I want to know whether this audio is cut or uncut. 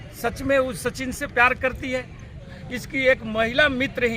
cut